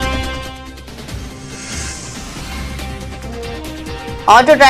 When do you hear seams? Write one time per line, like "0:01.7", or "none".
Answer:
none